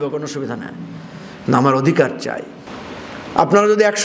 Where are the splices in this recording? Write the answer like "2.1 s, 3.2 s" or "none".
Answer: none